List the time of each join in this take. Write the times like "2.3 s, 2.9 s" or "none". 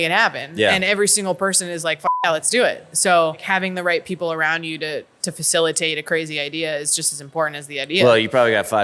3.4 s